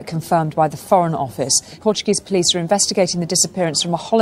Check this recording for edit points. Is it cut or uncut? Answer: cut